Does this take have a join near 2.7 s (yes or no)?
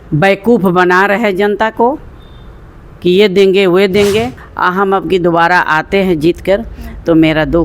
no